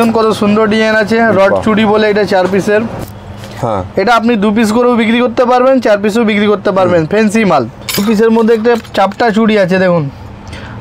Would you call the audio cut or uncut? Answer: cut